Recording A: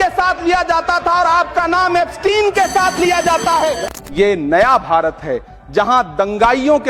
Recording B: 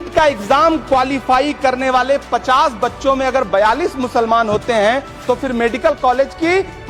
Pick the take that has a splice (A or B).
A